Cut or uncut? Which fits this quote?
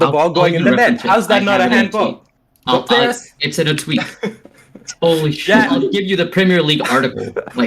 cut